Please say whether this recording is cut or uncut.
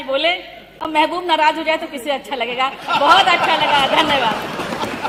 uncut